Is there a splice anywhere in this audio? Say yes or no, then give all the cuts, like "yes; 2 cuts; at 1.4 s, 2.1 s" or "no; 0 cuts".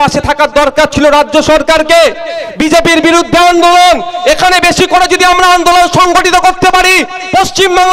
no; 0 cuts